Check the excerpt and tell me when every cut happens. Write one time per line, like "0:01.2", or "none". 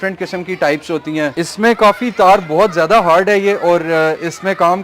0:01.3